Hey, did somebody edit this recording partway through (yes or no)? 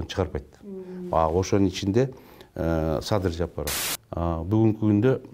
yes